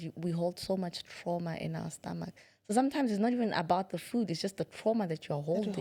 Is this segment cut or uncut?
uncut